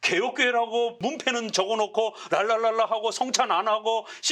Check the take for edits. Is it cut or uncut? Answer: cut